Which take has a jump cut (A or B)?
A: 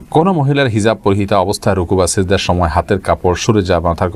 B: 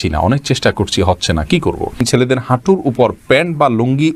B